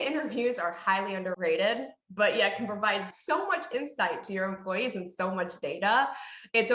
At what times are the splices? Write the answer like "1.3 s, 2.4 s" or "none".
1.3 s, 3.1 s